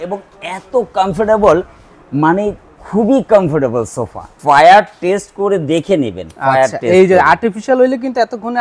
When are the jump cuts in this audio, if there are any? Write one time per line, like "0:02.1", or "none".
0:04.3